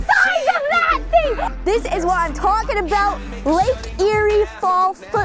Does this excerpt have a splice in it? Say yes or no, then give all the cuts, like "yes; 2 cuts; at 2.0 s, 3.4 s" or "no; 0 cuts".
yes; 1 cut; at 1.5 s